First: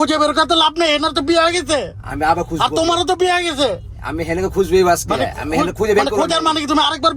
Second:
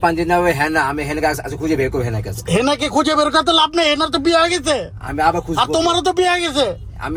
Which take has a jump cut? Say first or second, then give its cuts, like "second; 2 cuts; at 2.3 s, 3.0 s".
first; 1 cut; at 5.4 s